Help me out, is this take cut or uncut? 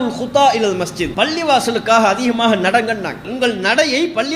cut